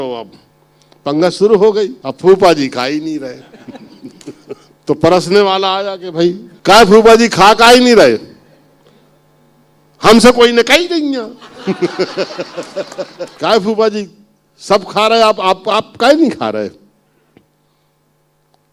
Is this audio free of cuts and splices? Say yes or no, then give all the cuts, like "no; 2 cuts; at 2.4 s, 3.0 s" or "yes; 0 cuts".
no; 4 cuts; at 2.0 s, 4.7 s, 6.5 s, 13.3 s